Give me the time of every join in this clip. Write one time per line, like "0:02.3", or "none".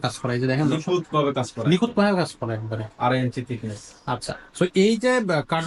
none

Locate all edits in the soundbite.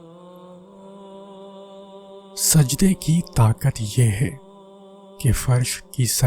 0:01.1
0:02.5

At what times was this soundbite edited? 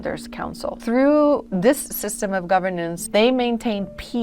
0:00.8
0:01.5
0:03.0

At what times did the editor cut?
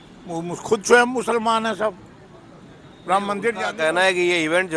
none

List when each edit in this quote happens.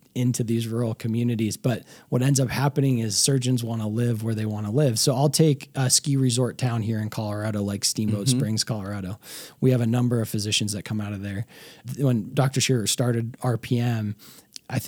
none

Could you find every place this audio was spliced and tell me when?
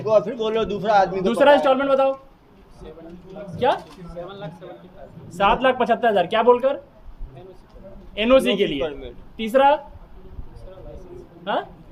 none

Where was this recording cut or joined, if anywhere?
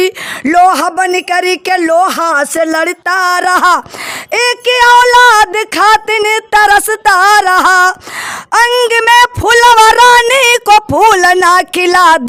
none

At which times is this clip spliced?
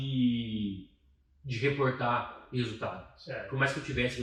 none

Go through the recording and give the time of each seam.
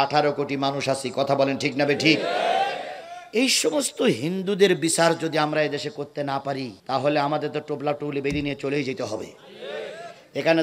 0:06.8

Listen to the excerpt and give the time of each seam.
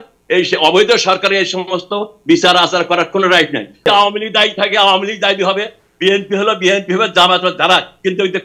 0:03.9

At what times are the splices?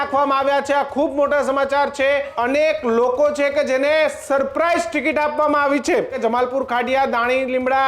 0:02.3
0:06.2

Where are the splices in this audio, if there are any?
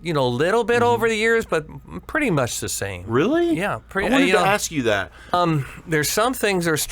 0:05.3

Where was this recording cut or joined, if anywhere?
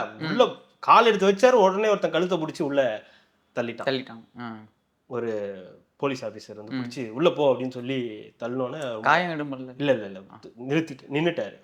none

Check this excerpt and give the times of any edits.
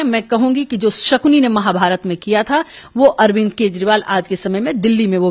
none

